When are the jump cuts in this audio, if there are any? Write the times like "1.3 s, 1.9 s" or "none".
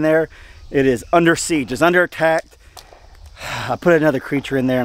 none